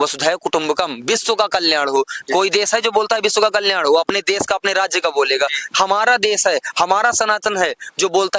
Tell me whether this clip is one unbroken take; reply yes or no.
yes